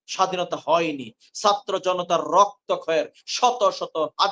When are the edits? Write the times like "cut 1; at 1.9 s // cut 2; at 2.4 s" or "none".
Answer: none